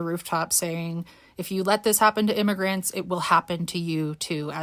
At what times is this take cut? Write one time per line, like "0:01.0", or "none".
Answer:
none